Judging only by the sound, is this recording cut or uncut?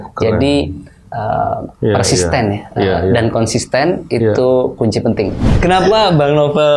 cut